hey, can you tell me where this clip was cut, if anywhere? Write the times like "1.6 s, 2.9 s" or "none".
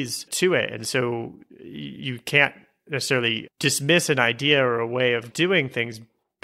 5.3 s